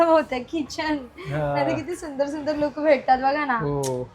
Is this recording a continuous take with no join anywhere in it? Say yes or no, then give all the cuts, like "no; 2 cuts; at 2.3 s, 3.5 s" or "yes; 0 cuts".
yes; 0 cuts